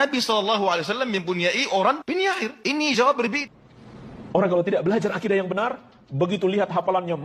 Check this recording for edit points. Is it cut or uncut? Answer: cut